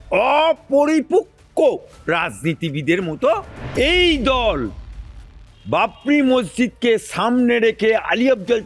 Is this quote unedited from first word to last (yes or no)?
no